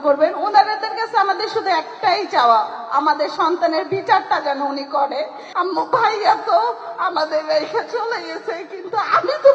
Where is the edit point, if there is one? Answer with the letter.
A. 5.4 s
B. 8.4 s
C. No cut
A